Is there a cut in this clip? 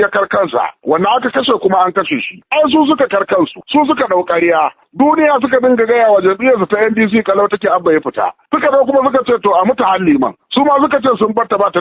yes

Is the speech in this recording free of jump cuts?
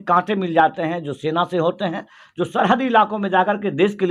yes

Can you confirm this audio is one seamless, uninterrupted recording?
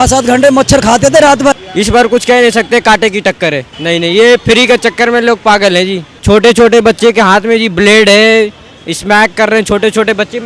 no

